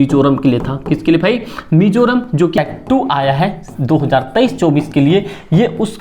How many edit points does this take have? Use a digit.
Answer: 1